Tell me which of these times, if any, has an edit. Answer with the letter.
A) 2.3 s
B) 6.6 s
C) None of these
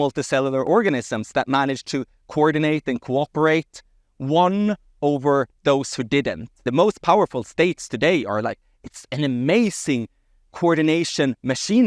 B